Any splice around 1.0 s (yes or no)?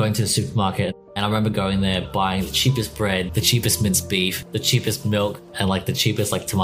yes